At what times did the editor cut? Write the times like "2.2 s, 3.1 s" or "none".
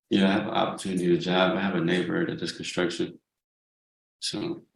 none